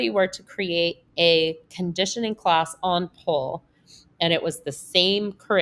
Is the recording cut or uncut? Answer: uncut